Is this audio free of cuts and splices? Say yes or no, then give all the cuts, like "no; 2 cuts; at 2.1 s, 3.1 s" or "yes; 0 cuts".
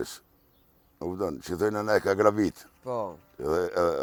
yes; 0 cuts